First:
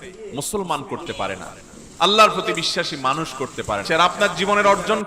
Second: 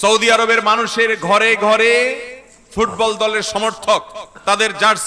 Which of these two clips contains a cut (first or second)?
first